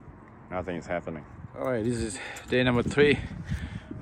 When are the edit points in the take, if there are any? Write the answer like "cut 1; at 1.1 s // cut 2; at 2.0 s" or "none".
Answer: cut 1; at 1.4 s

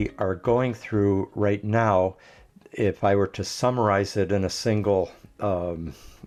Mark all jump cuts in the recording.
none

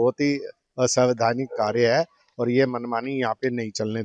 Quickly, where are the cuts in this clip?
none

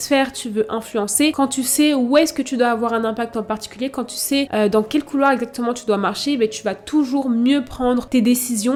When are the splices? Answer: none

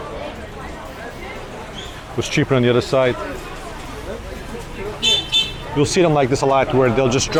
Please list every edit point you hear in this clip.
none

